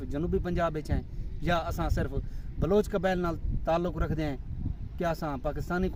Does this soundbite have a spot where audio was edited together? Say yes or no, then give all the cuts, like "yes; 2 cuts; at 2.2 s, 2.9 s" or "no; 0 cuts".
no; 0 cuts